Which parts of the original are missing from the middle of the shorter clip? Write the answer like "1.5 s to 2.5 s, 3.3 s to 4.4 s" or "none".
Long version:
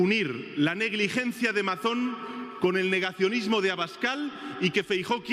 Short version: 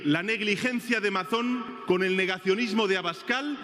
2.2 s to 2.5 s